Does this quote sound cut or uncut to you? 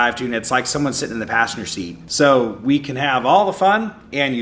cut